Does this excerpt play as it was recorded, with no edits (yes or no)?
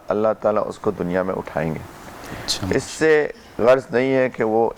yes